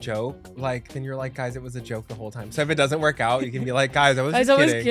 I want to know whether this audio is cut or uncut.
uncut